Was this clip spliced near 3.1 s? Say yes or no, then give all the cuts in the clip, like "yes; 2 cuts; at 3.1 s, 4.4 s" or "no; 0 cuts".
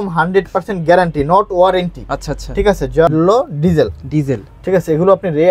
yes; 1 cut; at 3.1 s